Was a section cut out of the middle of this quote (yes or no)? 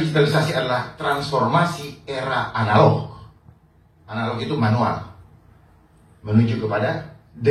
no